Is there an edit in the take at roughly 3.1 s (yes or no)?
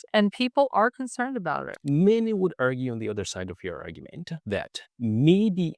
no